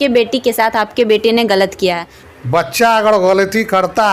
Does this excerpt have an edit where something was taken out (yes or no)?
yes